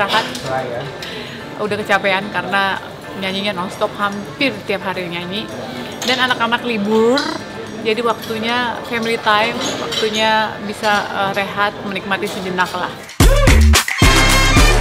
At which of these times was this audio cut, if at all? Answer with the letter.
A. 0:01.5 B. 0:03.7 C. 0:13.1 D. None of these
C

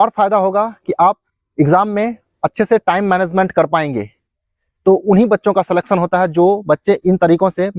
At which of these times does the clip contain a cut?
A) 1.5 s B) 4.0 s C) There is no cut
C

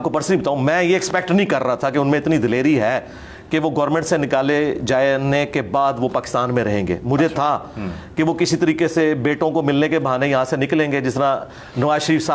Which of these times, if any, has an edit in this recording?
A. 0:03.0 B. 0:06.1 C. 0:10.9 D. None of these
D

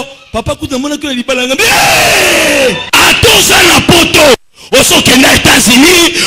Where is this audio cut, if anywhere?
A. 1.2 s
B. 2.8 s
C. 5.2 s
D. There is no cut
B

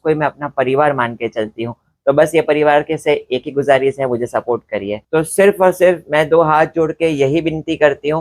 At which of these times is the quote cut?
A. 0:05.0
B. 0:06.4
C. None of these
A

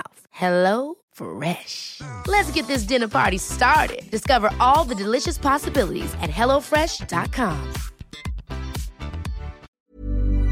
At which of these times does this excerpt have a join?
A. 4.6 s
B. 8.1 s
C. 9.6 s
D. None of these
C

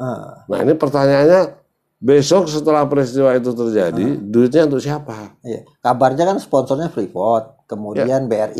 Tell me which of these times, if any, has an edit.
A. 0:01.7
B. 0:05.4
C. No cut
C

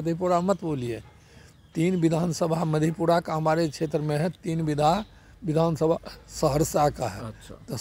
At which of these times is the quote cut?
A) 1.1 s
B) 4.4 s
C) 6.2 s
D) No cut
D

